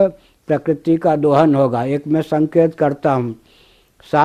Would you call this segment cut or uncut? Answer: uncut